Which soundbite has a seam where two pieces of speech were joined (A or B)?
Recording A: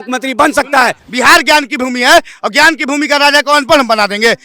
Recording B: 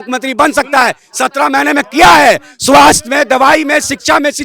A